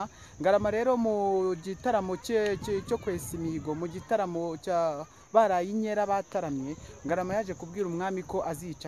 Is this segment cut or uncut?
uncut